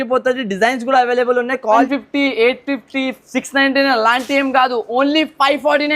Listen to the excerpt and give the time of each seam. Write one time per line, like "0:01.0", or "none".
0:01.8

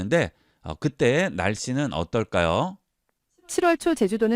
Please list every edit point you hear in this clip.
none

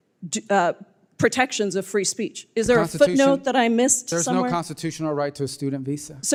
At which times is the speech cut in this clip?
none

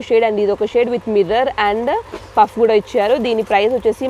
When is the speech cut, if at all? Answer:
none

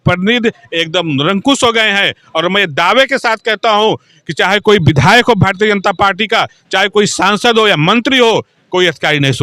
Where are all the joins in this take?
none

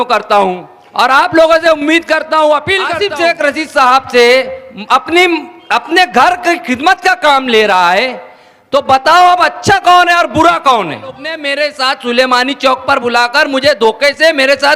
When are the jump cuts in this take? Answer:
0:02.9
0:11.4

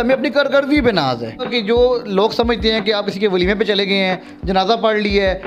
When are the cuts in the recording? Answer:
0:01.5

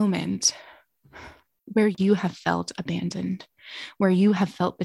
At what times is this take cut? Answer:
0:01.9

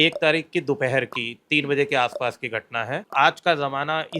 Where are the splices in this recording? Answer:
0:03.0

